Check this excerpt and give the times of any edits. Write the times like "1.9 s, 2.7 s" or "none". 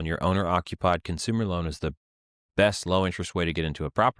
none